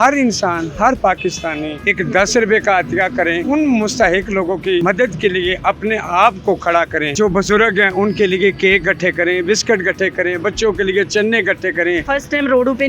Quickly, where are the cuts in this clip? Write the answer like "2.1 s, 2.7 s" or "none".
1.7 s, 3.4 s, 7.1 s, 12.0 s

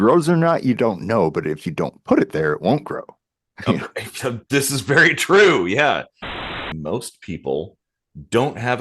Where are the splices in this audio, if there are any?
6.5 s

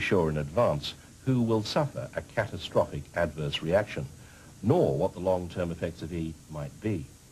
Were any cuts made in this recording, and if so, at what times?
5.0 s

